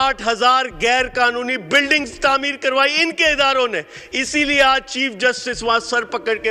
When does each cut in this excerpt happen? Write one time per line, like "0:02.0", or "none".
none